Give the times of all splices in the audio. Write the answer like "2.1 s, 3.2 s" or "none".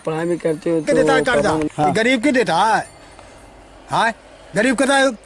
1.7 s